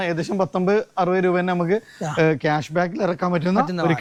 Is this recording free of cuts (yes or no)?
yes